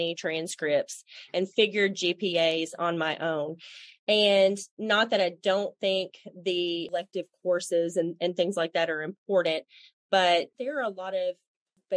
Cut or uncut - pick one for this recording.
cut